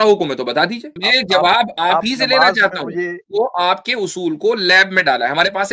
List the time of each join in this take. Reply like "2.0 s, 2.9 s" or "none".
0.9 s, 3.2 s